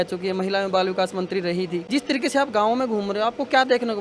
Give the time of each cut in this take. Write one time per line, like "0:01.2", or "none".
0:01.8